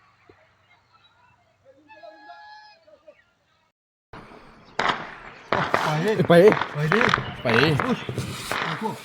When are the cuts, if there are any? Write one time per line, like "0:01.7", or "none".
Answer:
0:03.9